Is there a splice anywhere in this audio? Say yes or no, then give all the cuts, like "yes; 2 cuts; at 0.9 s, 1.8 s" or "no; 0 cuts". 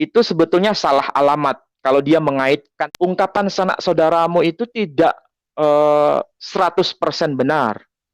yes; 1 cut; at 2.8 s